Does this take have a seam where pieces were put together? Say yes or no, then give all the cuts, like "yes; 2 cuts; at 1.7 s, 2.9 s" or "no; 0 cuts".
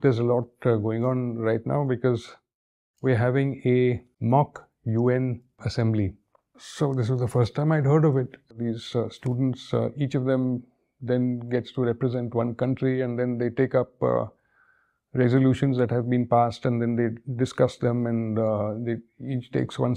yes; 4 cuts; at 4.1 s, 5.7 s, 6.6 s, 8.6 s